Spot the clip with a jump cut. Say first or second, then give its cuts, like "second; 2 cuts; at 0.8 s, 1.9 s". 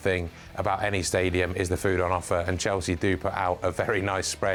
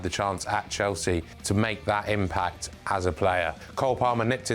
second; 2 cuts; at 1.3 s, 3.6 s